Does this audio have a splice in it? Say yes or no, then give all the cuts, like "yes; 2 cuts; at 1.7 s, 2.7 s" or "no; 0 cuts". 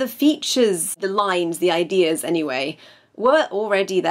yes; 1 cut; at 1.0 s